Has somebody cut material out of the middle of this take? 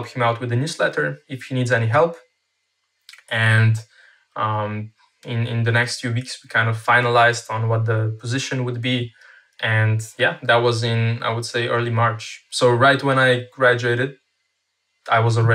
no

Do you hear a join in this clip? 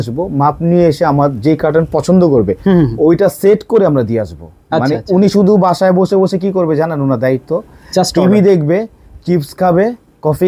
no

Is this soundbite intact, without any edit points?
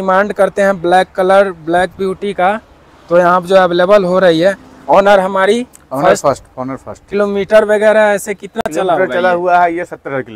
yes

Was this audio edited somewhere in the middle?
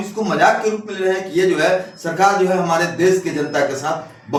no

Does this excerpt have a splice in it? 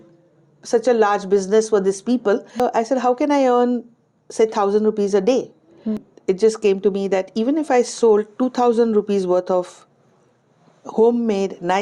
yes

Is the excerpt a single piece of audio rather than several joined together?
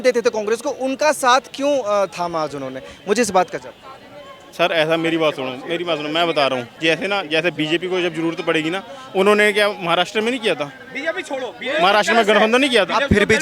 yes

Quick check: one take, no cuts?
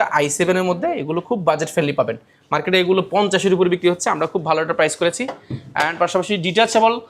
yes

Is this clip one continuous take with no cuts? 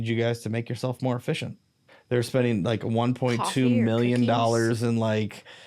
no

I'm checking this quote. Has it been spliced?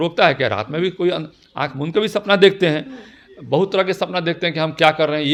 no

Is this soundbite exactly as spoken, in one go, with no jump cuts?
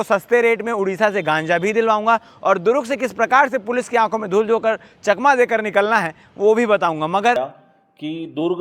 no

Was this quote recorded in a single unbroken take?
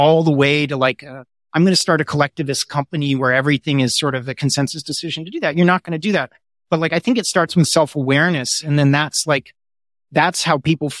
yes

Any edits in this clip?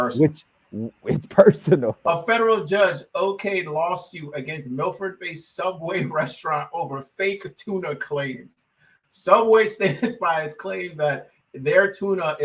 yes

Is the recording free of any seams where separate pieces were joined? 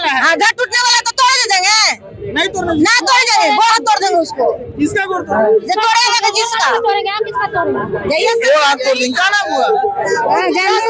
yes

